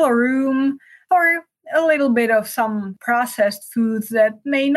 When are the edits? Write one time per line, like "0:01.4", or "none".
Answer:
0:01.0
0:02.9